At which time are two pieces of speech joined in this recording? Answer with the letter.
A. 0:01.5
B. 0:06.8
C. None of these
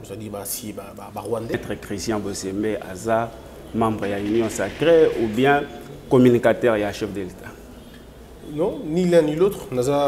A